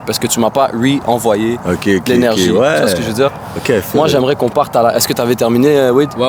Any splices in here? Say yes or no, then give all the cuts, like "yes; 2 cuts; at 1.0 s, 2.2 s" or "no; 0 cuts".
no; 0 cuts